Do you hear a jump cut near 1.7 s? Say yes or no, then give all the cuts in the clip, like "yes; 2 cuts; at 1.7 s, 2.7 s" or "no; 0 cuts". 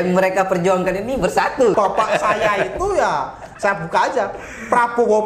yes; 1 cut; at 1.7 s